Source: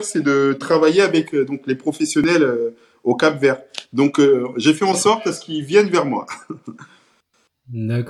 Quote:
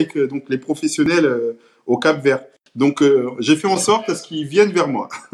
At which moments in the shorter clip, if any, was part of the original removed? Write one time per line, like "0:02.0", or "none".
none